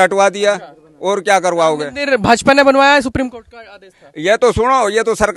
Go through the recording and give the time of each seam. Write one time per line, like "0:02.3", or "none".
none